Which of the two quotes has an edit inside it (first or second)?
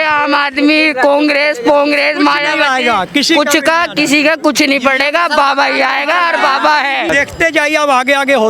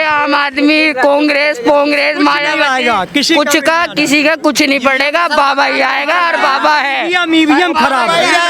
first